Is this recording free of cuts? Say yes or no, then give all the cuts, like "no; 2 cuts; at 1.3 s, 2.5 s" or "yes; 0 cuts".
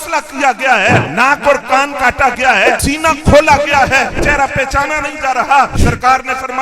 no; 4 cuts; at 1.1 s, 2.8 s, 4.2 s, 5.7 s